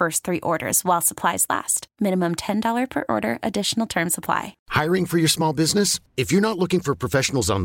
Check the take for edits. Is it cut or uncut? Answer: cut